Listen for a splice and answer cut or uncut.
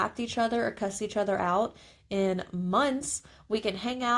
uncut